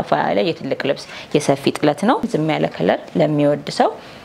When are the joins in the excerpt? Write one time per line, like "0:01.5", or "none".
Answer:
0:02.2